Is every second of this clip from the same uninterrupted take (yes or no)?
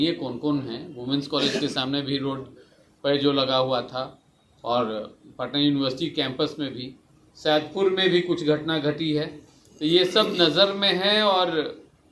yes